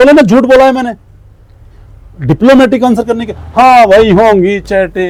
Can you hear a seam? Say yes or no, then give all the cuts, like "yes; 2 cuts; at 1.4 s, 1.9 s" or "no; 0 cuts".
no; 0 cuts